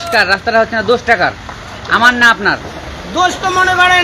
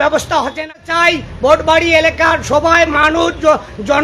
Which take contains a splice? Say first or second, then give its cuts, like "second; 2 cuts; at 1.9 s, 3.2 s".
second; 1 cut; at 0.9 s